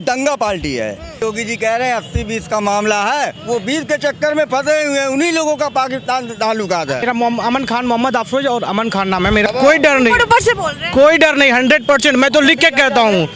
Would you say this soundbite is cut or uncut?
cut